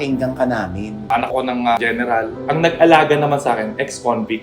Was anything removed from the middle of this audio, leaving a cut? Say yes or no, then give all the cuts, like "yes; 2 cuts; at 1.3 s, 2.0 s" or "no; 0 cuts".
yes; 2 cuts; at 1.3 s, 2.4 s